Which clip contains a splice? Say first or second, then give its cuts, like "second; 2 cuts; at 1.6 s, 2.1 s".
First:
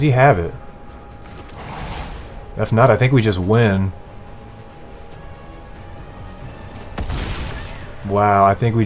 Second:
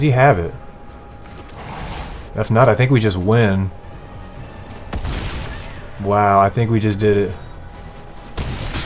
second; 3 cuts; at 2.3 s, 3.8 s, 7.7 s